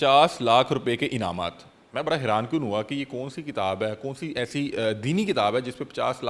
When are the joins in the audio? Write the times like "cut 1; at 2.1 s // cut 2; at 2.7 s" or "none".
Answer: none